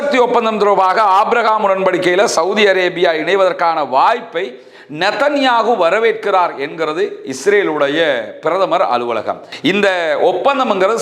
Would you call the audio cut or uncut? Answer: cut